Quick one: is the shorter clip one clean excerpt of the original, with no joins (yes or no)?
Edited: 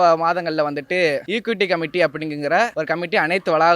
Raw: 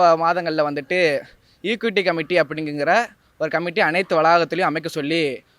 no